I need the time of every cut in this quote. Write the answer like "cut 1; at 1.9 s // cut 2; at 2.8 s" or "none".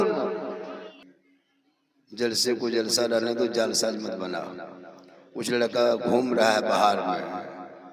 cut 1; at 1.0 s